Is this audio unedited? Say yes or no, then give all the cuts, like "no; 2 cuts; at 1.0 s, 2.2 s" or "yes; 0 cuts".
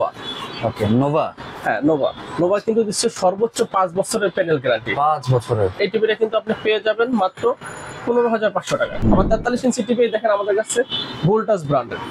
no; 2 cuts; at 5.8 s, 9.0 s